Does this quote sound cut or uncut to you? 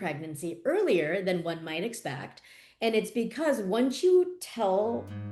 uncut